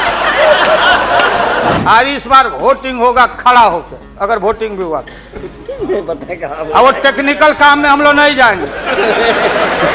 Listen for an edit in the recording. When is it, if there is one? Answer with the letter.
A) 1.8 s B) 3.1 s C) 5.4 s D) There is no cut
A